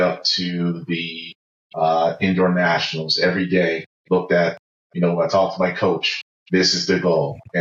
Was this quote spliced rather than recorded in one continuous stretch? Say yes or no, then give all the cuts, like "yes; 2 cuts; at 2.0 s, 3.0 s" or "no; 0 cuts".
no; 0 cuts